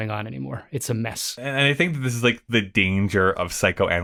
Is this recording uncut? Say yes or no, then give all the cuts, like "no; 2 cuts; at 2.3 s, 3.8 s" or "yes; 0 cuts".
yes; 0 cuts